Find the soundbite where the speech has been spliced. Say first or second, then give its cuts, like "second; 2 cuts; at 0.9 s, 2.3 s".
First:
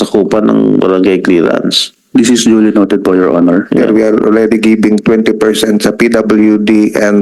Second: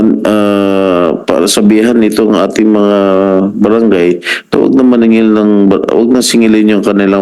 first; 1 cut; at 3.8 s